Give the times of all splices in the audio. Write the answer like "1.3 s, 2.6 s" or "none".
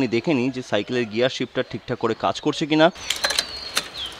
3.0 s